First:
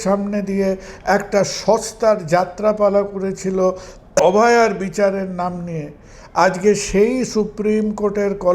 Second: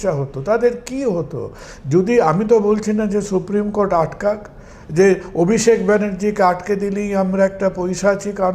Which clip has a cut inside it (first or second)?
first